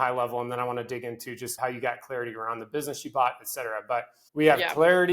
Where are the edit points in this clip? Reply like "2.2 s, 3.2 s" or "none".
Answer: 1.5 s, 4.2 s